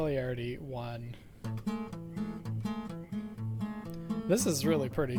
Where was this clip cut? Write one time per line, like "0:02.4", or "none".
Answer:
none

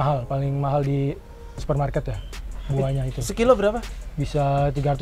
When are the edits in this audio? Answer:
none

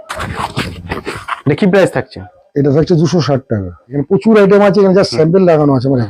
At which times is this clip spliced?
0:03.9

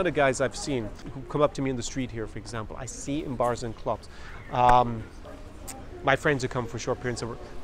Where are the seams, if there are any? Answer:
0:01.0

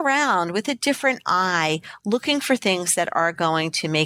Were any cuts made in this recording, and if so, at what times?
none

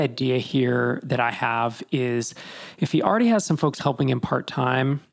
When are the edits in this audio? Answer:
none

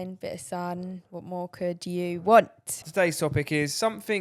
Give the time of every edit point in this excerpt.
0:02.8

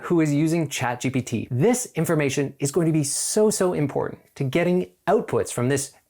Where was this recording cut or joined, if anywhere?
0:01.4

